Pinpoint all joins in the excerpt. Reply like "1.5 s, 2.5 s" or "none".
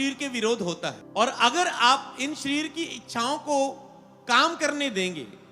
1.0 s